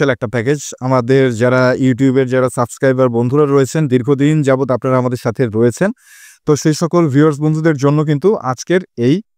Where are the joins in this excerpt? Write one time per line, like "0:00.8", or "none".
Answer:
none